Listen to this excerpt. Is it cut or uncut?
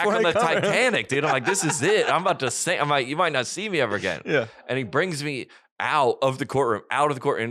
uncut